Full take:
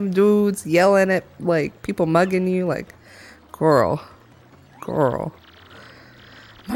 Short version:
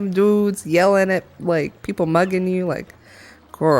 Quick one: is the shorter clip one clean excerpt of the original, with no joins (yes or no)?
yes